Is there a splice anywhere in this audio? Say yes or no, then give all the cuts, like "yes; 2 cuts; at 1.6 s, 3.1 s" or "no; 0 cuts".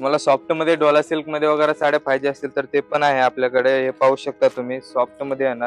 no; 0 cuts